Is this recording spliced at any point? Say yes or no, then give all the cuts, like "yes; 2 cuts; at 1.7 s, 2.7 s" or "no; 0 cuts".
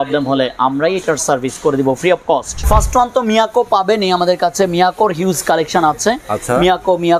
yes; 1 cut; at 2.5 s